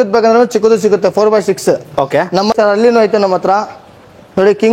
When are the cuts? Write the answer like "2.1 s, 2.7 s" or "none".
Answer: 2.5 s